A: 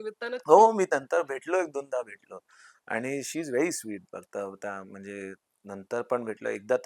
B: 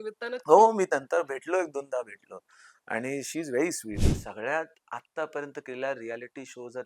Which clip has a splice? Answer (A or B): B